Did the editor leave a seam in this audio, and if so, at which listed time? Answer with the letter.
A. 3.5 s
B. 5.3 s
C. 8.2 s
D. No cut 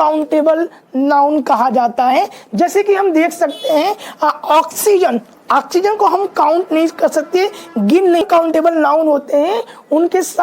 C